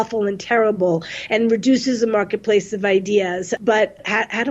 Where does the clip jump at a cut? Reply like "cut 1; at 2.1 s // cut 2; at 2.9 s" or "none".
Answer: cut 1; at 3.6 s